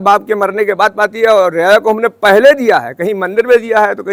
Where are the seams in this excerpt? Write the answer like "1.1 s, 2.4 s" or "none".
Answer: none